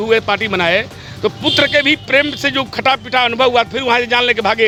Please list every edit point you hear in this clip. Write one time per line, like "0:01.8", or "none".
none